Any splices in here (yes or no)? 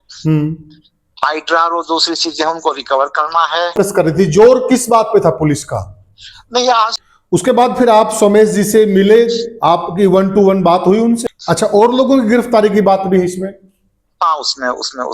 yes